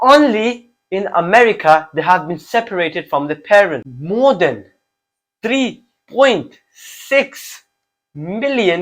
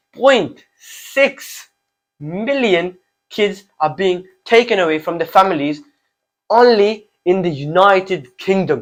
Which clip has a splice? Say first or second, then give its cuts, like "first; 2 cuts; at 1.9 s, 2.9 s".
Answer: first; 1 cut; at 3.9 s